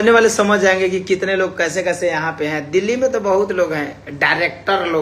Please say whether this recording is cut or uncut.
uncut